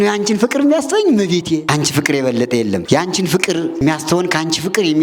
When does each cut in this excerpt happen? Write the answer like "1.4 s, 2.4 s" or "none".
1.6 s, 2.8 s, 3.8 s